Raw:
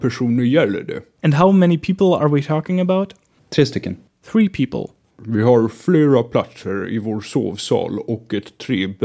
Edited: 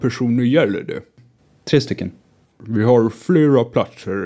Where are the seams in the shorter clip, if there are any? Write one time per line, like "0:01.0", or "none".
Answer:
0:01.2
0:02.3